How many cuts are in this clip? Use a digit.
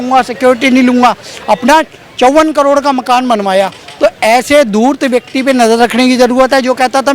0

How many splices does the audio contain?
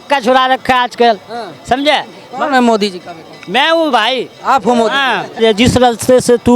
1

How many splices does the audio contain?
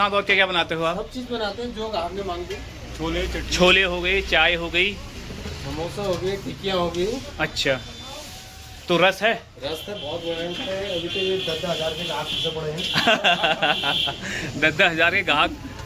0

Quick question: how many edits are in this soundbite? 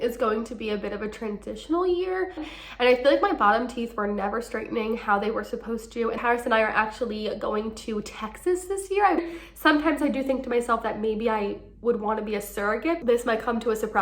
4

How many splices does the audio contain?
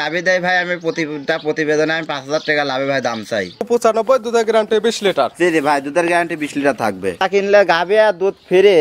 2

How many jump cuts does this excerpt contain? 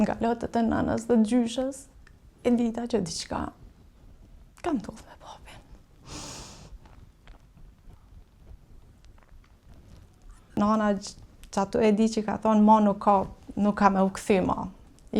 1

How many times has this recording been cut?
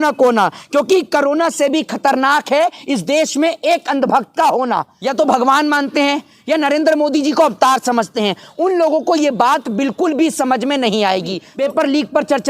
2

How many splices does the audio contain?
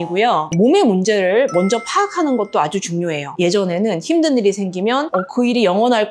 1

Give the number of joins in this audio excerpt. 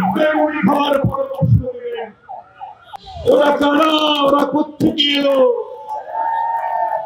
1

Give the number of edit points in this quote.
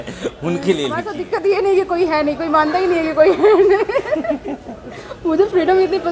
1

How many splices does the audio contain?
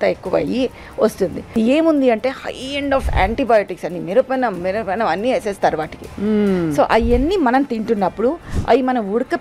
1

